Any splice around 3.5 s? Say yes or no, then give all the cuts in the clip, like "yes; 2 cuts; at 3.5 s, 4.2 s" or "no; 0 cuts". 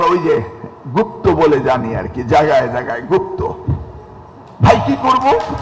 no; 0 cuts